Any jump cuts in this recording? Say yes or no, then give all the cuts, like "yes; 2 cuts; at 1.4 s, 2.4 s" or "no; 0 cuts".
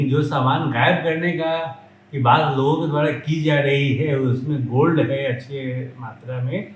no; 0 cuts